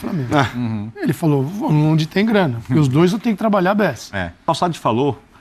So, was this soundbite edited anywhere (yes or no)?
yes